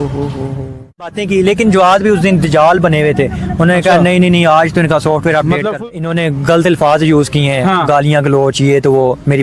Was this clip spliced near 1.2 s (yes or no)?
yes